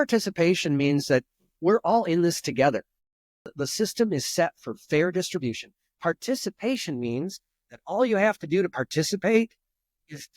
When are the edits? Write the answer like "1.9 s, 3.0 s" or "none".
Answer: 3.6 s